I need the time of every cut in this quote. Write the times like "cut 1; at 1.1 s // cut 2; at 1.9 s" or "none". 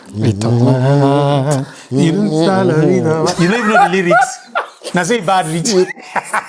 none